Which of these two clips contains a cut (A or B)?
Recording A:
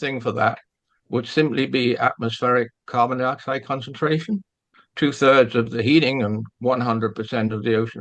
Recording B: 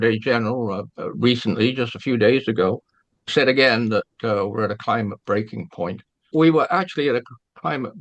A